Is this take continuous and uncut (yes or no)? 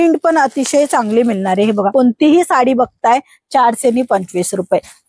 no